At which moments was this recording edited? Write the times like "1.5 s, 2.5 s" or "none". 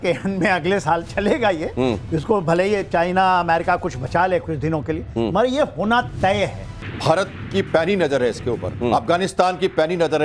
6.7 s